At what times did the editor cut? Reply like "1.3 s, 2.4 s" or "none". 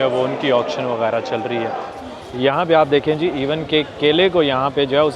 1.9 s